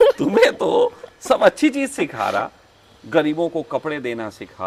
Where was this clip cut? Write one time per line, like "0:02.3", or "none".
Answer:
none